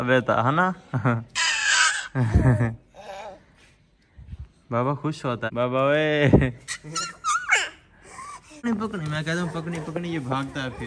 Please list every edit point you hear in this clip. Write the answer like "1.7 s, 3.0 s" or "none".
5.4 s, 8.6 s